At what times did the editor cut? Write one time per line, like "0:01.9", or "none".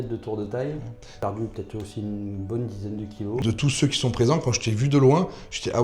0:01.1
0:03.4